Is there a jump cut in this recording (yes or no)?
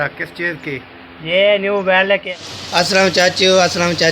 yes